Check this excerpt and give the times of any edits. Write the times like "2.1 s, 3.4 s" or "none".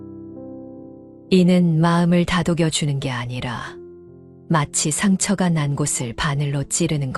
1.2 s